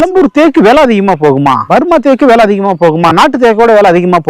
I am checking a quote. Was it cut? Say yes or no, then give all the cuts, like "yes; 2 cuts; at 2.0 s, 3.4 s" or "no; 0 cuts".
yes; 1 cut; at 1.6 s